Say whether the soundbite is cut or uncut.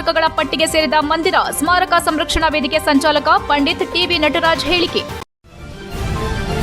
cut